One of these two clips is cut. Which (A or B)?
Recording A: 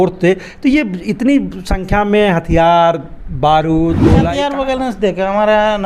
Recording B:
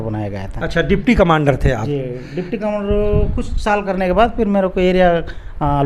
A